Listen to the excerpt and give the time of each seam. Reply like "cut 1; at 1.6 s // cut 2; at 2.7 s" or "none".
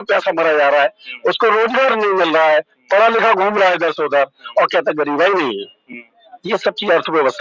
none